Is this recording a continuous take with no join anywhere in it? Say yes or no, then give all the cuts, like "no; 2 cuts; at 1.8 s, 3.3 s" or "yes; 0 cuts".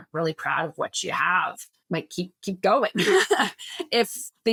yes; 0 cuts